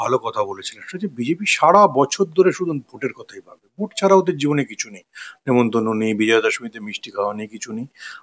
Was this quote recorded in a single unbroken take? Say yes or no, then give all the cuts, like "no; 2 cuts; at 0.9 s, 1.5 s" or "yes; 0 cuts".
yes; 0 cuts